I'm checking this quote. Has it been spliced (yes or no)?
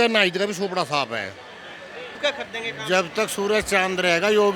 yes